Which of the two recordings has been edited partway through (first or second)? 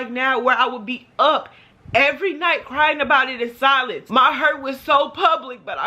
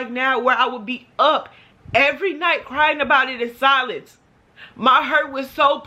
first